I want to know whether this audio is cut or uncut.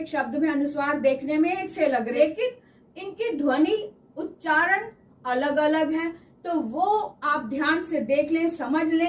cut